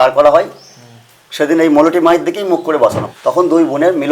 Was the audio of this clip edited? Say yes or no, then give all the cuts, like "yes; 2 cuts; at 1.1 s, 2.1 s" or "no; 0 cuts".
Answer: yes; 1 cut; at 3.1 s